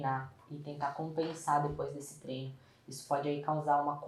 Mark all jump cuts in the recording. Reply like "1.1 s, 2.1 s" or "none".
none